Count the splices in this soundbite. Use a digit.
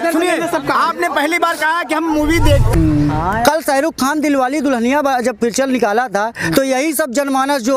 1